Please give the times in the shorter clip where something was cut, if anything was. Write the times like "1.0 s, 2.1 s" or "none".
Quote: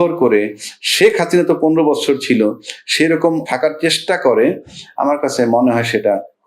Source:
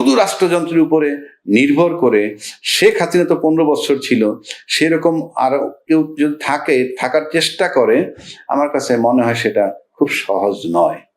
3.5 s